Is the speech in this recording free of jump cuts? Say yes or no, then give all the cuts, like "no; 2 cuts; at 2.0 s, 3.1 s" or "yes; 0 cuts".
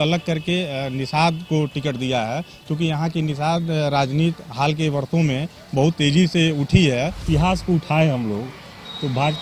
no; 1 cut; at 7.2 s